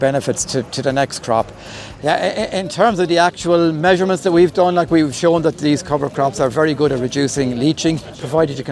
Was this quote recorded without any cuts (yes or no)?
yes